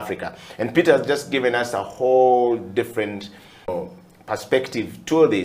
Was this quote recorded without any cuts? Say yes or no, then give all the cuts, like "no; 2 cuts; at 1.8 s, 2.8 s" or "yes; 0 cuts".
no; 1 cut; at 3.7 s